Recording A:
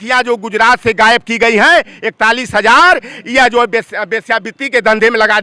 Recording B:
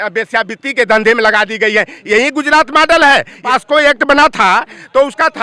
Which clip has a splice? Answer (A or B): B